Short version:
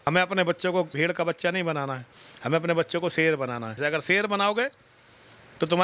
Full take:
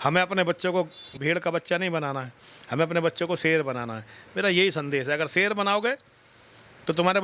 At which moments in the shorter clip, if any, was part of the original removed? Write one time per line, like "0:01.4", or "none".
0:00.9
0:03.8